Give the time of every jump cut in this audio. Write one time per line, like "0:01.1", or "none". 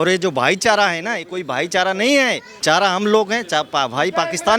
0:02.6

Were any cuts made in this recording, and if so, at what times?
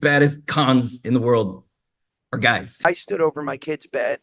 0:02.9

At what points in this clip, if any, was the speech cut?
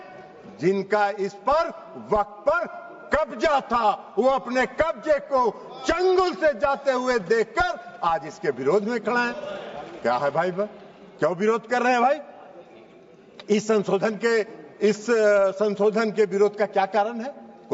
none

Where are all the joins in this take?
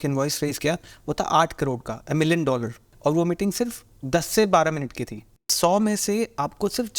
0:02.9
0:05.5

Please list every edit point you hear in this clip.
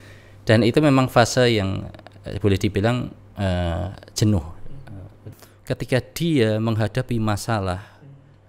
0:05.2

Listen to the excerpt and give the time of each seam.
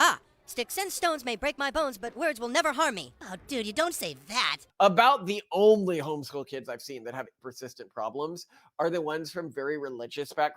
0:04.6
0:07.4

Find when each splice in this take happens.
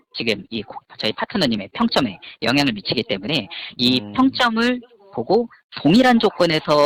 none

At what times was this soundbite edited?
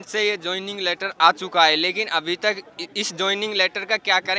none

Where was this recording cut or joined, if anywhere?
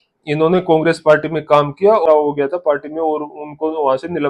0:02.0

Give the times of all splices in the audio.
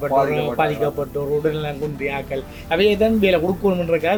none

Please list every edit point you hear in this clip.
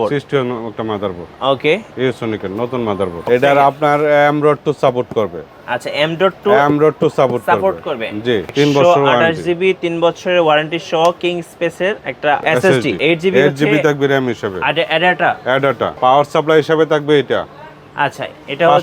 0:03.2
0:08.5
0:13.0
0:15.9

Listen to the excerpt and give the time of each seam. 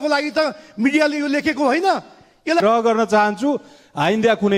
0:02.6

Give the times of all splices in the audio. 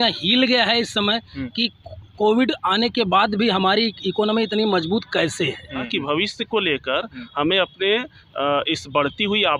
0:05.9

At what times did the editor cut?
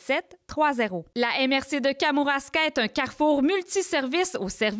0:01.1

